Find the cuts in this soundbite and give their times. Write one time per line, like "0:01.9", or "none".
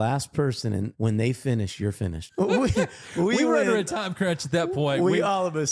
0:00.9
0:02.2